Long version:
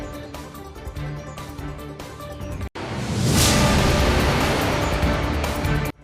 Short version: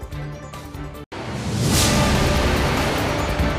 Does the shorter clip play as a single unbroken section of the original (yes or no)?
no